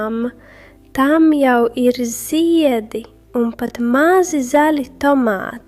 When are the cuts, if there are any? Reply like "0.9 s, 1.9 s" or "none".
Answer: none